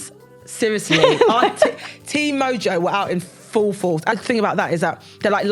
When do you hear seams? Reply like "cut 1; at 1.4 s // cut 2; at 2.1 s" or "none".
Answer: cut 1; at 4.1 s